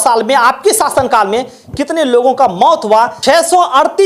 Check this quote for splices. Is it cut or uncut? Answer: cut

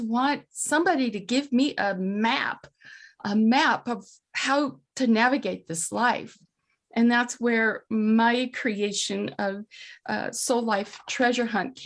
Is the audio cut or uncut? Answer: uncut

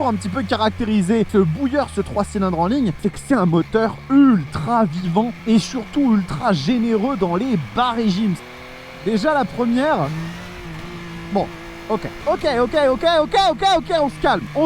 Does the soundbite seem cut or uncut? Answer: cut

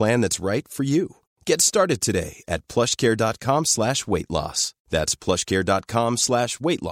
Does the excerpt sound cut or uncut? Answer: uncut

